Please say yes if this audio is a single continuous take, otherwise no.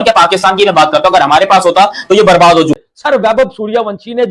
no